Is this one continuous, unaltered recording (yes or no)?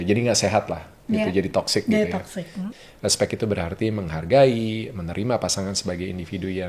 no